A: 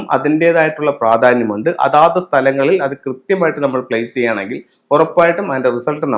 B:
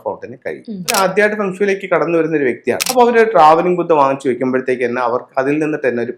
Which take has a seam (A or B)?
B